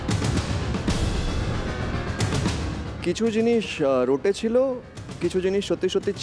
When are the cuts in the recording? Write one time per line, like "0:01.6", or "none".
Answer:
none

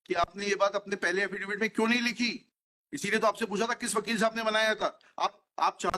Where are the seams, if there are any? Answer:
none

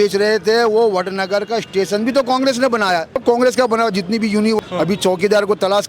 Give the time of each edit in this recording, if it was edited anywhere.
0:03.2
0:04.6

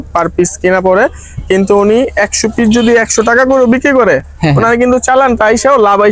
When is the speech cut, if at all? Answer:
none

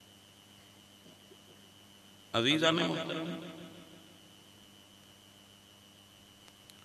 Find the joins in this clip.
none

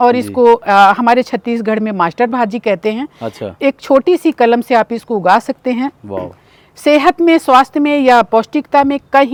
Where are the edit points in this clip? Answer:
none

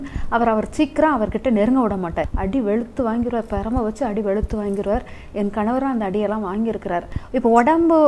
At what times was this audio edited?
0:02.2
0:07.1

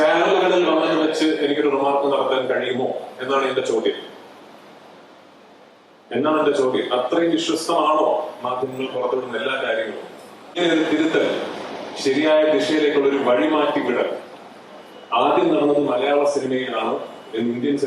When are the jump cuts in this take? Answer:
0:10.6

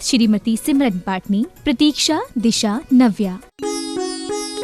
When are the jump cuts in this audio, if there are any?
0:03.5

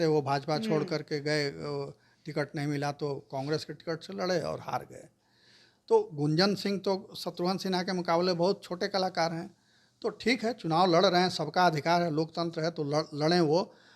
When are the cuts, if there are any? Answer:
none

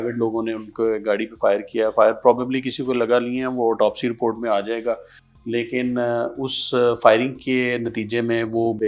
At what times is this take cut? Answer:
none

